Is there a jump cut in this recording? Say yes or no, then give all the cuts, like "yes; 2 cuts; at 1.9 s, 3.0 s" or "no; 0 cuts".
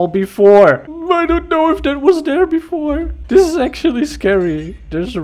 yes; 2 cuts; at 0.9 s, 3.1 s